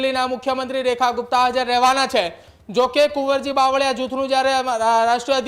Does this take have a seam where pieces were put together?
no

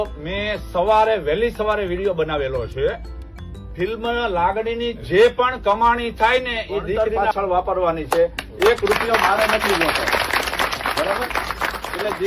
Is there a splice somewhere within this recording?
yes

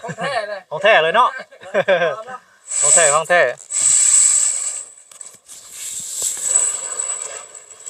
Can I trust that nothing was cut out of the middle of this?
yes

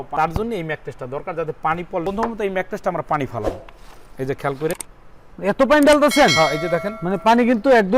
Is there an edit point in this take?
no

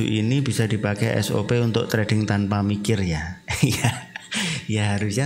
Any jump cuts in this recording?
no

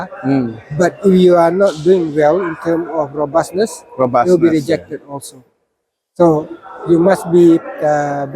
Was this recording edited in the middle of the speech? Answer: no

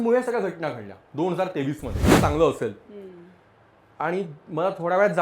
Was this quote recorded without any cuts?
no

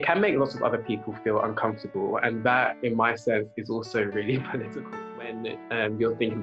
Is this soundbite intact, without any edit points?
no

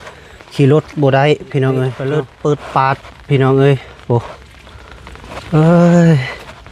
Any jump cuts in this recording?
yes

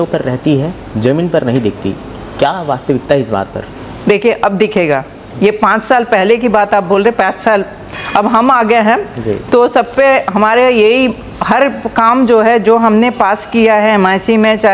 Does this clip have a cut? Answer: no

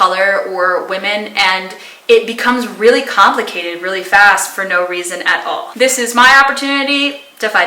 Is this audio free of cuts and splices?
yes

